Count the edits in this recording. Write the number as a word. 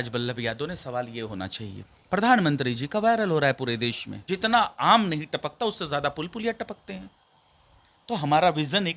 two